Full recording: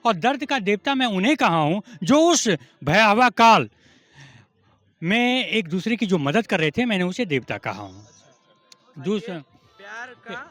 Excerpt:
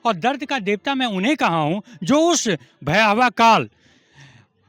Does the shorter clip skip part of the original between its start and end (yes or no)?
no